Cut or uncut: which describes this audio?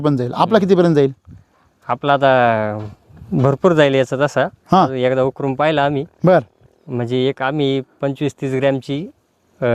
uncut